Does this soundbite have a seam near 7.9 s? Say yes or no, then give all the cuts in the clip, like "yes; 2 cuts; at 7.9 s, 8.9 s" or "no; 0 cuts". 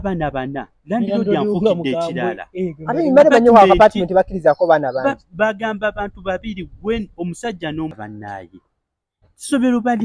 yes; 1 cut; at 7.9 s